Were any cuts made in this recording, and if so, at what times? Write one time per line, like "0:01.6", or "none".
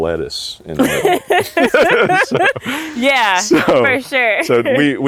none